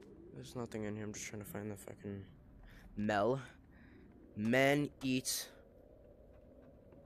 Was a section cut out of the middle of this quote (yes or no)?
no